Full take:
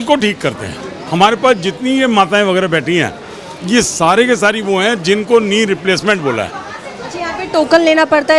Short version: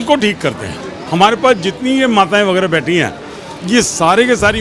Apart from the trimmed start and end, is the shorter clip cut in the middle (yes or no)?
no